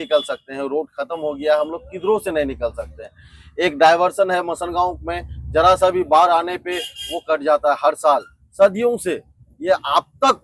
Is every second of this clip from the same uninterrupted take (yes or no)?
yes